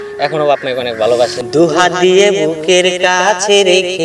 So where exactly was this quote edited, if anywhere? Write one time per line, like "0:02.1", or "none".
0:01.4

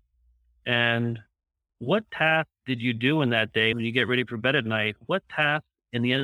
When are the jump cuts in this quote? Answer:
0:03.7

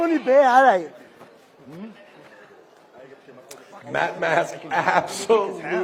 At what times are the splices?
none

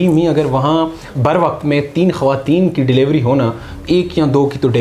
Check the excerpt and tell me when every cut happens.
0:01.0
0:03.7

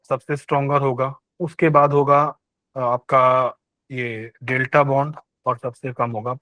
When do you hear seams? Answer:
0:01.2
0:05.3

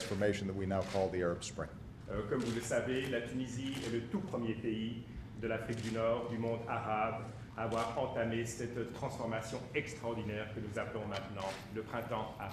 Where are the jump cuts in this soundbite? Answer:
0:07.8

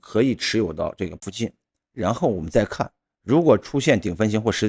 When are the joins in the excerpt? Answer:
0:01.2

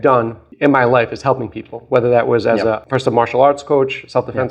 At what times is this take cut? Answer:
0:02.8

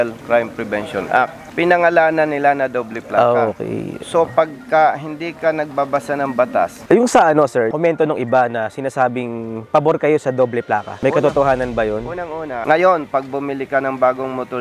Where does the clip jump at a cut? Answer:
0:01.4
0:06.8
0:12.6

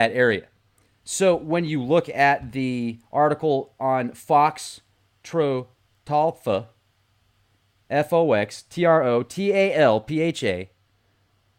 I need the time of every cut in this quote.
none

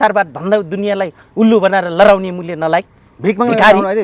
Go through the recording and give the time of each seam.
none

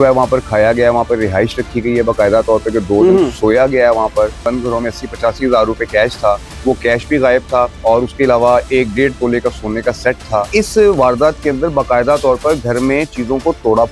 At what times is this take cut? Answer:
0:04.4
0:06.5
0:07.7
0:10.5

